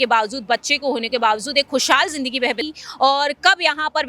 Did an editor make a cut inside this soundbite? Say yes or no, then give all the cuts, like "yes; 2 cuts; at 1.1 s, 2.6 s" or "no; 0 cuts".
yes; 1 cut; at 2.6 s